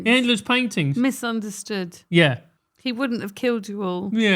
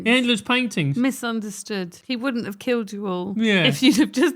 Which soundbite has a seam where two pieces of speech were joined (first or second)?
second